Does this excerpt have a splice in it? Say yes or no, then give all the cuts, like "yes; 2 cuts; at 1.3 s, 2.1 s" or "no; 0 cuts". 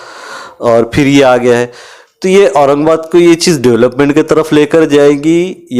no; 0 cuts